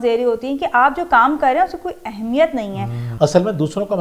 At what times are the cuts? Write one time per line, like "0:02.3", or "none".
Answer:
0:03.0